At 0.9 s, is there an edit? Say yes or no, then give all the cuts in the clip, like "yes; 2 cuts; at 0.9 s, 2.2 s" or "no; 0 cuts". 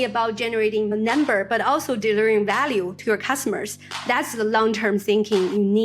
yes; 1 cut; at 0.9 s